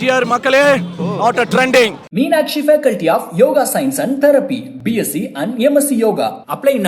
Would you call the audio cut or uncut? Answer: cut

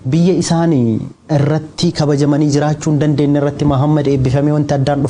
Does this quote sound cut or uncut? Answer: uncut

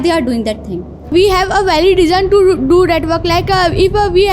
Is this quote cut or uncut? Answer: cut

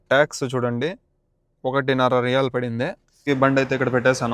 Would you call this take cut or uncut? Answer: cut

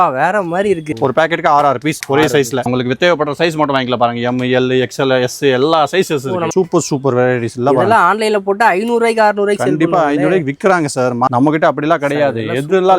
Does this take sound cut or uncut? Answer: cut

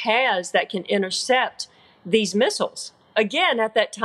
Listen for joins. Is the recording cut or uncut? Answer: cut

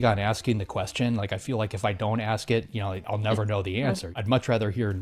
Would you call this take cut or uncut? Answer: cut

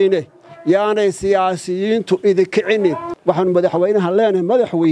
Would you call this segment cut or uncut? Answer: cut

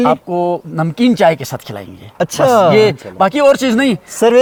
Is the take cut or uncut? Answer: uncut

